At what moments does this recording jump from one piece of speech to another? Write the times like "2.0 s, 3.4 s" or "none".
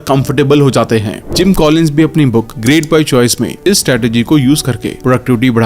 1.2 s